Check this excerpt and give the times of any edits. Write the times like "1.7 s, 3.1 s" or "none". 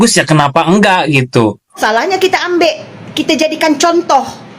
1.8 s